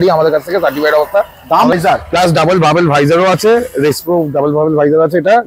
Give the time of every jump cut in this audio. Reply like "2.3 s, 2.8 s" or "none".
1.7 s